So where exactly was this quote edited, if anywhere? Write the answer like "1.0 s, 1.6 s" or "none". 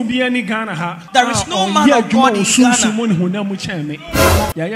1.0 s